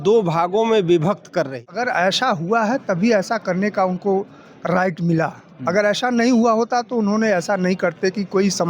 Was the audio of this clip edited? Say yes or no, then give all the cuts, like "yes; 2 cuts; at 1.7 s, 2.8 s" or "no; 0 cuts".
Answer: yes; 1 cut; at 1.7 s